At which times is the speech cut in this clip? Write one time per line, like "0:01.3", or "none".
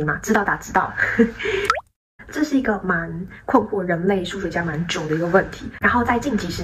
none

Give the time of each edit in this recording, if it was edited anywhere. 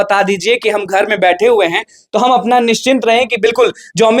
none

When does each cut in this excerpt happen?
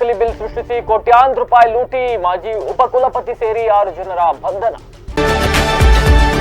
0:05.0

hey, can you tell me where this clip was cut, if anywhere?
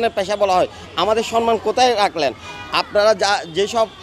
none

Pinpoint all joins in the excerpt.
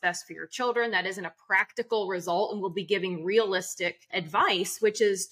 0:04.2

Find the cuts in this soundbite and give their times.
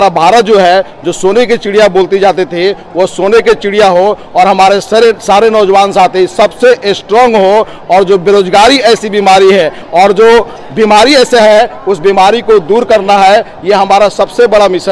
none

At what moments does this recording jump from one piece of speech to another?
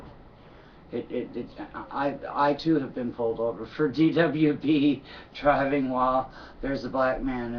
0:04.3

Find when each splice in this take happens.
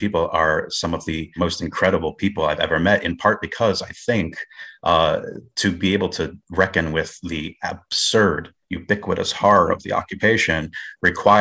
0:01.3

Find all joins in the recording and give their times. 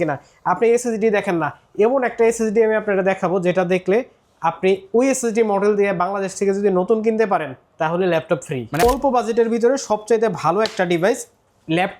0:08.8

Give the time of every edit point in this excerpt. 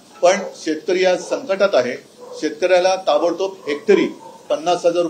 none

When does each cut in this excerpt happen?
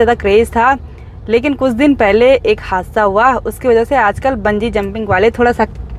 none

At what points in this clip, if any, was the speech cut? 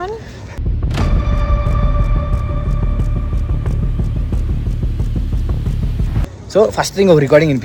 none

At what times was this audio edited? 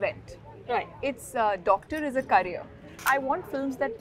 0:03.0

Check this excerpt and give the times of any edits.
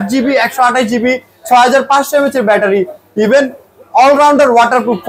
none

